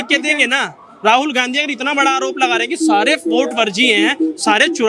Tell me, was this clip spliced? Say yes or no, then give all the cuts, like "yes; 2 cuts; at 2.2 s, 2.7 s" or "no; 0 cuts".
no; 0 cuts